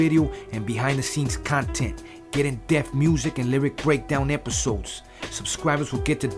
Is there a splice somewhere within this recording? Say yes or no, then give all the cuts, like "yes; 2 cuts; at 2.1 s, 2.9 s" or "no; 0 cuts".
no; 0 cuts